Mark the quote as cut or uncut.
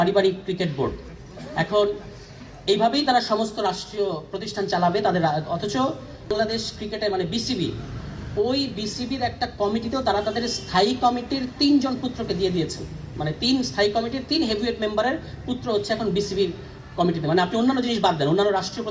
cut